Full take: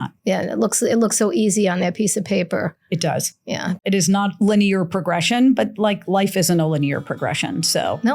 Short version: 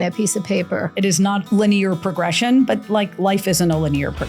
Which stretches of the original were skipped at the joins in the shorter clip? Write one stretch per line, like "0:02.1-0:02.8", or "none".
0:02.7-0:03.8